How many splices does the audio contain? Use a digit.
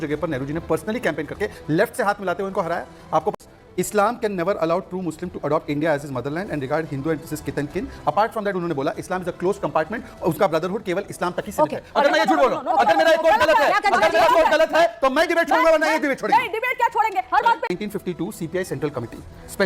2